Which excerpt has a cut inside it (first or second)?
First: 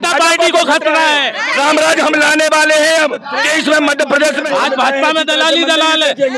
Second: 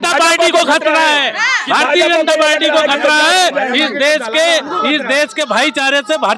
first